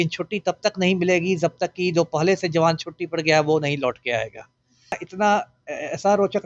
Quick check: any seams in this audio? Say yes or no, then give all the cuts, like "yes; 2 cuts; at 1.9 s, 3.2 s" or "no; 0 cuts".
yes; 1 cut; at 5.1 s